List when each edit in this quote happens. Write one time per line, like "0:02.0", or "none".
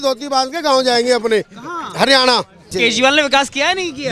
0:02.8